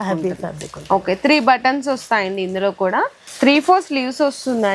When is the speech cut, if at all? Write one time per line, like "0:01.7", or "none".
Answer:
0:03.2